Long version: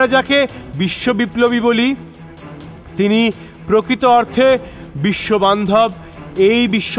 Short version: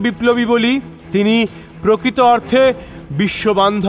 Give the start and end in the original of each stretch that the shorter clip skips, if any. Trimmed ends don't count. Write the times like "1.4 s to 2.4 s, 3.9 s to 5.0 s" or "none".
2.1 s to 2.8 s